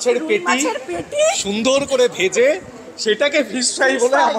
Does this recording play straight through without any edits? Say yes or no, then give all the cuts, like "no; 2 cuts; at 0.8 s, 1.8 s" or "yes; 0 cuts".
yes; 0 cuts